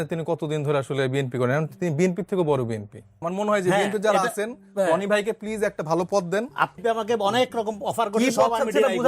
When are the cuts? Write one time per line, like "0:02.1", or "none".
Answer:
0:03.2
0:06.8